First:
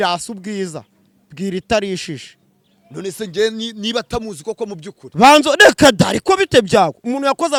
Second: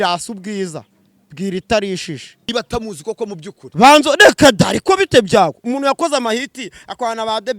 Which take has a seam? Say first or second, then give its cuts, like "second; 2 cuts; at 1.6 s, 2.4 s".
second; 1 cut; at 2.5 s